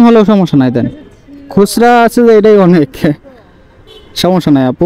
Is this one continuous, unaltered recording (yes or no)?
yes